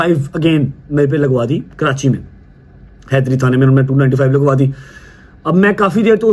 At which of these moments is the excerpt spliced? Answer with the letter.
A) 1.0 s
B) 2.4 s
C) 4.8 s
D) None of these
D